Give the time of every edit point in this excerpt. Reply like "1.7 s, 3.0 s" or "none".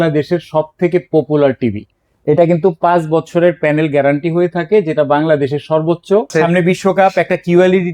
6.3 s